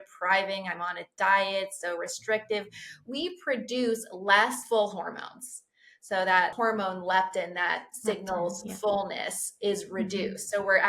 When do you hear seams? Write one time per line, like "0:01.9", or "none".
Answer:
0:04.6
0:06.5